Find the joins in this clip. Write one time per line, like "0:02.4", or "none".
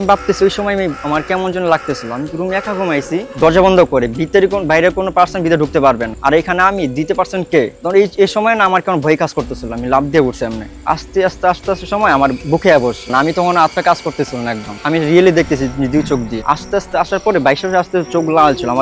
0:13.0
0:14.7